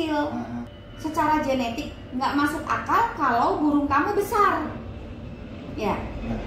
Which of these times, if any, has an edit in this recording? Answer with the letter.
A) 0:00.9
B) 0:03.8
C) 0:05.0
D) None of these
D